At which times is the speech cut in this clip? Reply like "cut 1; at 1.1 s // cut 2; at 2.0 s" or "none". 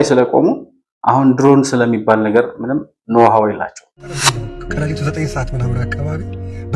cut 1; at 4.2 s